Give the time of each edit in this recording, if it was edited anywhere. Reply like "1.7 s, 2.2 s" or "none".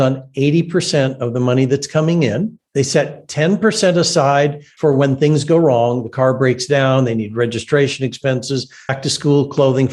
4.6 s, 9.0 s